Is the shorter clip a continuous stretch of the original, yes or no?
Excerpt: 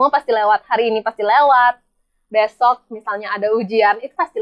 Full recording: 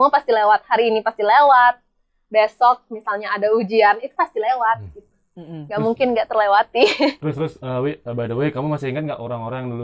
yes